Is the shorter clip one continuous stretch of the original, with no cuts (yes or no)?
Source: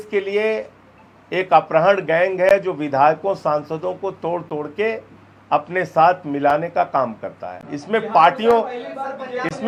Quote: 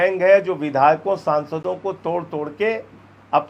yes